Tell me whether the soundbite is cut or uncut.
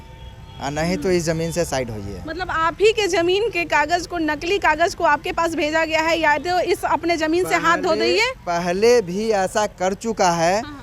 uncut